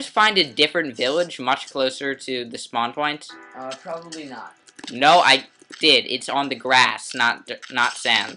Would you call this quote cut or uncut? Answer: cut